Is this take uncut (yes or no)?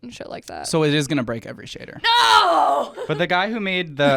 no